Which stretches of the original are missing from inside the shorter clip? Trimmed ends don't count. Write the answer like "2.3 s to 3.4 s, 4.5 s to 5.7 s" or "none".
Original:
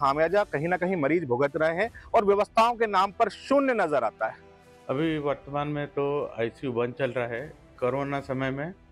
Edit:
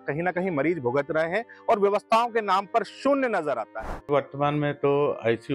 4.5 s to 5.2 s